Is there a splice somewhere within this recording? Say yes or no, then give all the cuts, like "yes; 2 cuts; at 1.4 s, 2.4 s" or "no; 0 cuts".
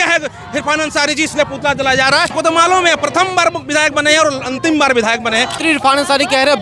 yes; 2 cuts; at 2.3 s, 5.5 s